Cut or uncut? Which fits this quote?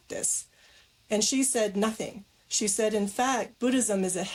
uncut